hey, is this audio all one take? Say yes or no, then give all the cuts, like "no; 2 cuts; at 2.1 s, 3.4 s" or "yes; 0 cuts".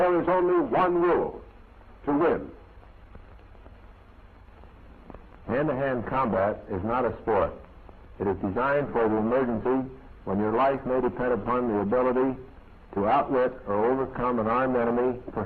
yes; 0 cuts